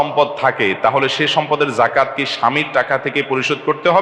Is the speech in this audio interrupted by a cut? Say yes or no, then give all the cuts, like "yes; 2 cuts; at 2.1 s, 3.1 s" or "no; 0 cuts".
no; 0 cuts